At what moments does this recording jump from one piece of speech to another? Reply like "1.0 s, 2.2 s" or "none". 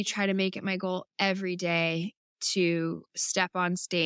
none